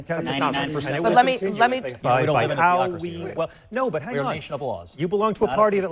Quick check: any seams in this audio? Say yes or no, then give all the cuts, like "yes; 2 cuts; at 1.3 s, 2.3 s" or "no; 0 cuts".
yes; 1 cut; at 1.9 s